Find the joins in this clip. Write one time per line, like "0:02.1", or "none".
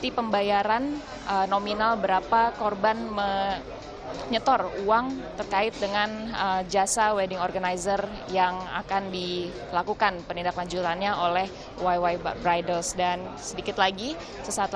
0:02.5

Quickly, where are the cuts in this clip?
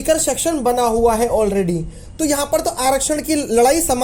none

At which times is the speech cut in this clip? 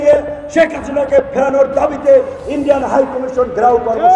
none

